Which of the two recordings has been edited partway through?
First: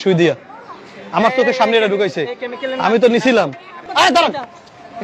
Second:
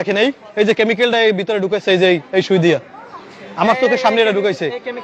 first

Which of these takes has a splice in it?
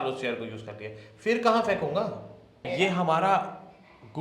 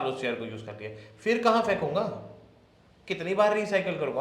first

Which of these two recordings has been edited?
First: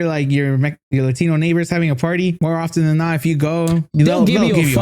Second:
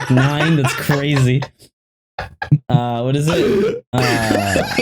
first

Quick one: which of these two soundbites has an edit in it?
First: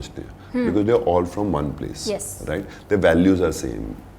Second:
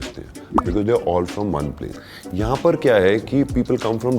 second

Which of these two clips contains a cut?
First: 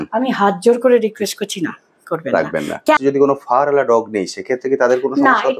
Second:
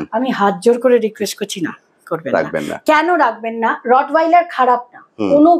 first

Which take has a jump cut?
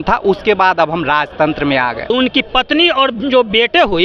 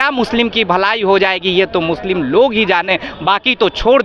first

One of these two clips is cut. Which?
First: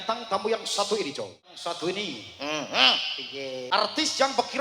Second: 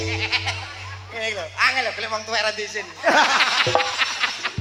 first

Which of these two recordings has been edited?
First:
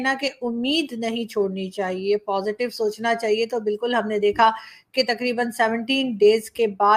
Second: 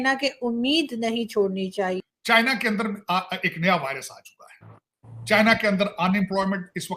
second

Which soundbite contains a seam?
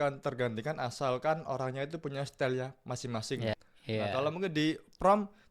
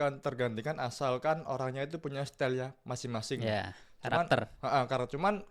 first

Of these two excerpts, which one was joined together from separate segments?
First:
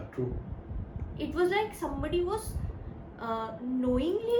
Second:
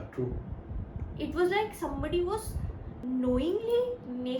second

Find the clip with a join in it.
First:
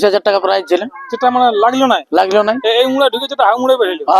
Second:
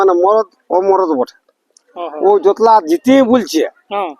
second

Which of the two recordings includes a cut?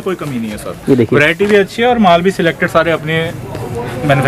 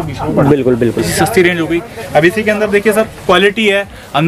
second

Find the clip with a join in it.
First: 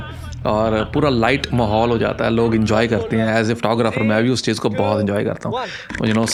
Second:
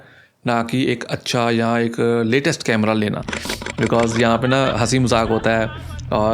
second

